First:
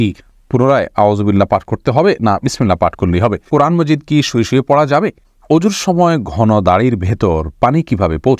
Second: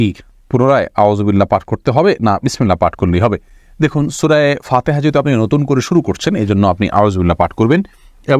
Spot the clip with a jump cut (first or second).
first